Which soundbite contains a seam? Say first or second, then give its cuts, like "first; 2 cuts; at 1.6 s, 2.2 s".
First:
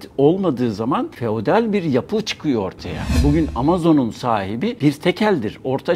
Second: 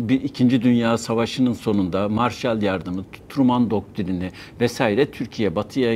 first; 3 cuts; at 1.1 s, 3.1 s, 4.8 s